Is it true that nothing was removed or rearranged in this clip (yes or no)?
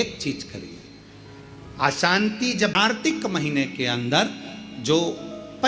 no